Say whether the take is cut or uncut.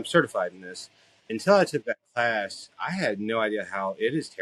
uncut